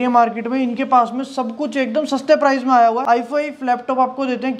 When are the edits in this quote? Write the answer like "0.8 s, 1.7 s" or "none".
3.0 s